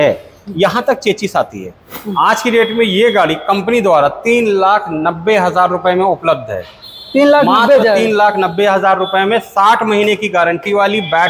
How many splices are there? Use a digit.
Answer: 1